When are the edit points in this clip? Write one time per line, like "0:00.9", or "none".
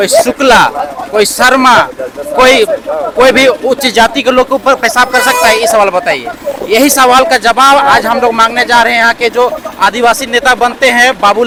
none